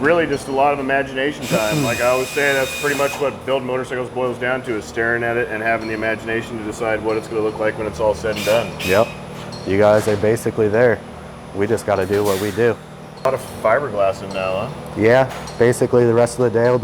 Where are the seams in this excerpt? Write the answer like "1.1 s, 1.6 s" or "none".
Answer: 13.3 s